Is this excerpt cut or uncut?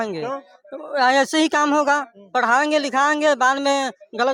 uncut